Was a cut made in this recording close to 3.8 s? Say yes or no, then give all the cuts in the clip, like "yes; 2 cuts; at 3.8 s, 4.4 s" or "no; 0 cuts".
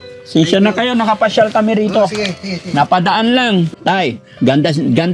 yes; 1 cut; at 3.8 s